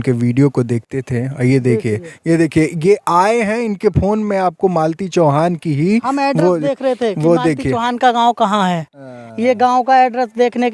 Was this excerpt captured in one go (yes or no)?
yes